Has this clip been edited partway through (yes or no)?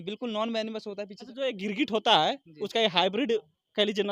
yes